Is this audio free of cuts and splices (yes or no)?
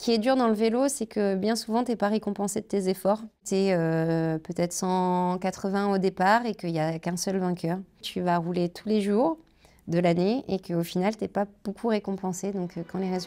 no